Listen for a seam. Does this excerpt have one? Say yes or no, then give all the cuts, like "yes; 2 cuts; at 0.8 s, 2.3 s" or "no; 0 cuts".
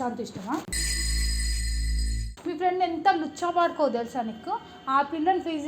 yes; 1 cut; at 2.2 s